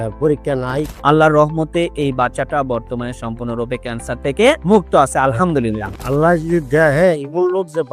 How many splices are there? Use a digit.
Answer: 2